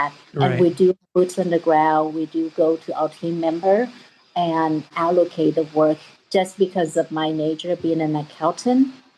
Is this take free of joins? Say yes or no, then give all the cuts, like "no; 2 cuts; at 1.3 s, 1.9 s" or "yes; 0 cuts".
yes; 0 cuts